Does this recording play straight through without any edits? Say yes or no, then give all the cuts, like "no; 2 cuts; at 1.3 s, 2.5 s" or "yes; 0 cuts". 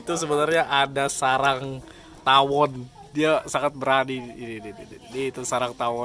yes; 0 cuts